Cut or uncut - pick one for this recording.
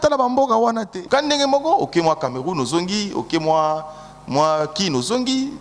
cut